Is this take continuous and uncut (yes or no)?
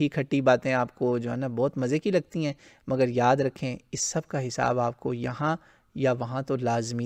yes